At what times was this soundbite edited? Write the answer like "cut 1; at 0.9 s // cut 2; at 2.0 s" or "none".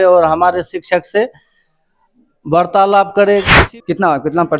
cut 1; at 3.6 s